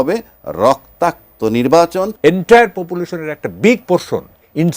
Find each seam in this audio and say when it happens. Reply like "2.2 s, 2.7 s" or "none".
2.1 s